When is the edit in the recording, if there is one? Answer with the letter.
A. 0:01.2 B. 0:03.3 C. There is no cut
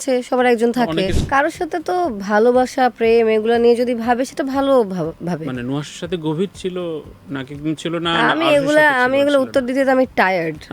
A